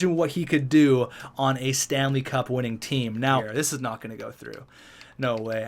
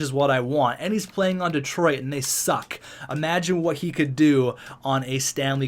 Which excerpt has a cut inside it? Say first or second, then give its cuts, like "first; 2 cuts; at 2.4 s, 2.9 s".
first; 1 cut; at 3.5 s